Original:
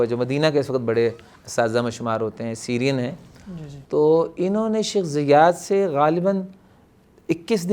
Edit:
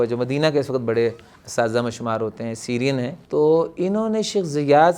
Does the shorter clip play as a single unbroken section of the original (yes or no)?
no